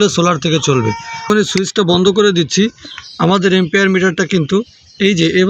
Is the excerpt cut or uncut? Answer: cut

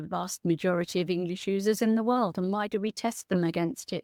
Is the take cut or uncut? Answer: uncut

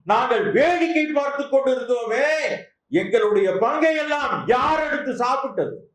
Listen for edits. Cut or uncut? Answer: uncut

